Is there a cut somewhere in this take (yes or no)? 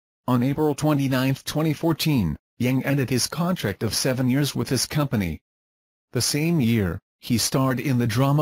no